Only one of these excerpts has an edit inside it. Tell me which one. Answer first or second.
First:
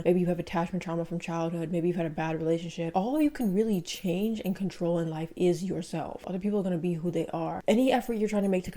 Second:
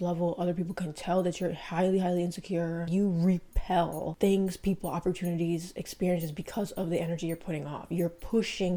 first